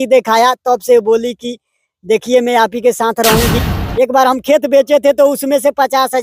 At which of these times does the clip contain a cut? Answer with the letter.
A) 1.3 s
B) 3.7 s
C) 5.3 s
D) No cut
B